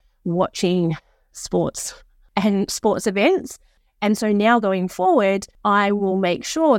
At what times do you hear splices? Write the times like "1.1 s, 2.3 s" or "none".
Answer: 2.1 s, 3.8 s, 5.5 s

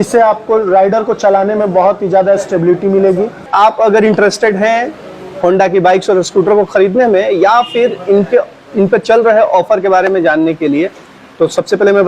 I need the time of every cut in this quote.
3.5 s

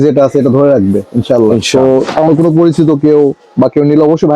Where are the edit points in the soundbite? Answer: 1.6 s

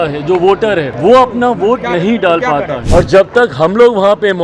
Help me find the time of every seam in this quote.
0.9 s, 2.8 s

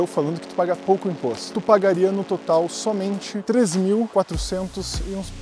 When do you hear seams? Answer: 1.5 s, 3.3 s, 4.1 s

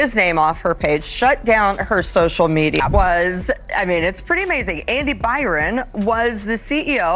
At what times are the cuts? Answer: 2.8 s

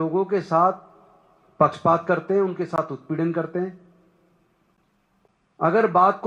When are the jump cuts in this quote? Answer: none

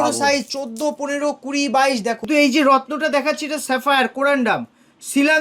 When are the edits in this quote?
2.2 s

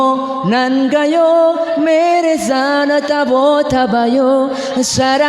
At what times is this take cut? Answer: none

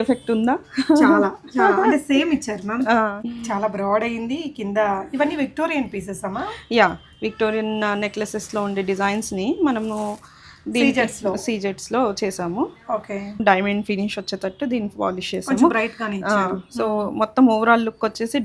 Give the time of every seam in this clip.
3.3 s, 13.4 s

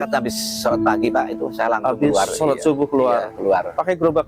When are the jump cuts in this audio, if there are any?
none

